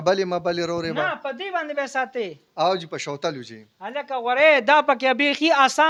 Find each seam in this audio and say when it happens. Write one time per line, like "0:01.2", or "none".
none